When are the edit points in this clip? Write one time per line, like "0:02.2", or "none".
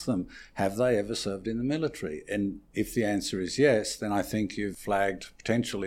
0:04.8